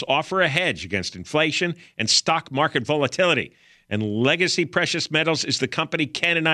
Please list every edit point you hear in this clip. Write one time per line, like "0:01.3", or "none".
none